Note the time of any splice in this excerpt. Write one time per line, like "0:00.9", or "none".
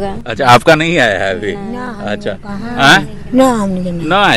none